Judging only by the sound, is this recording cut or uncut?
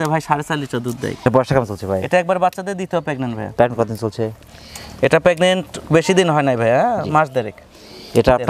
uncut